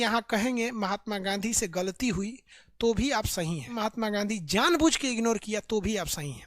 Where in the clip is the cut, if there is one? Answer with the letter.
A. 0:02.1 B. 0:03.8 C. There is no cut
B